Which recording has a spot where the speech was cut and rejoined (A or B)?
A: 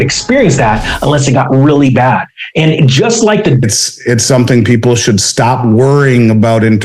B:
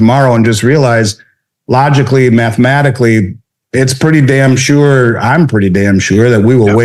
A